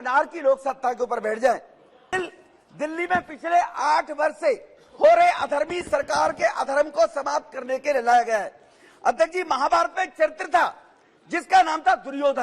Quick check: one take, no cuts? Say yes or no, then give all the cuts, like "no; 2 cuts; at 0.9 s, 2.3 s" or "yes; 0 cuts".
no; 1 cut; at 2.1 s